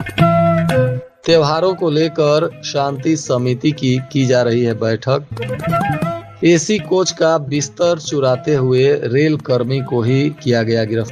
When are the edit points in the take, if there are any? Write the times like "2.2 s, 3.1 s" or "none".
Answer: 1.1 s